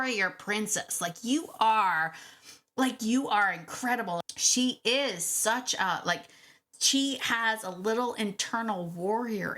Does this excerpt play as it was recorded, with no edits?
no; 1 cut; at 4.2 s

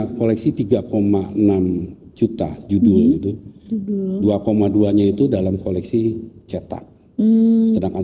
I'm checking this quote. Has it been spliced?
no; 0 cuts

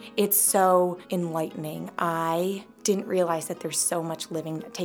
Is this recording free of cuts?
no; 2 cuts; at 1.0 s, 2.7 s

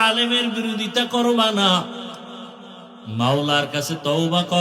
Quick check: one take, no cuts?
yes; 0 cuts

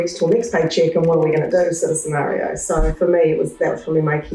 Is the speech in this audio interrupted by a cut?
yes; 1 cut; at 2.9 s

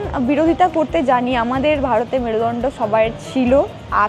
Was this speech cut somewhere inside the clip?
no; 0 cuts

